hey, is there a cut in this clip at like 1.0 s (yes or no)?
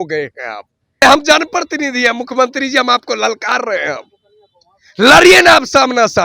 yes